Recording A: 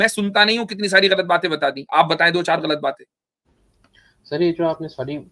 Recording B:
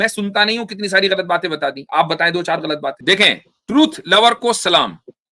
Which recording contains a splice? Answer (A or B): B